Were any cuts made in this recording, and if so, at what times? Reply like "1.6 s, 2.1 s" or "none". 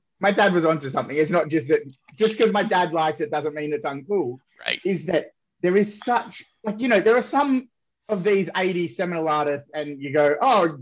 none